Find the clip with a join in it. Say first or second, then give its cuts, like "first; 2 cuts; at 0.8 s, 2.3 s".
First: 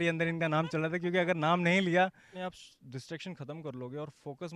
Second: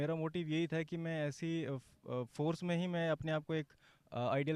first; 1 cut; at 2.3 s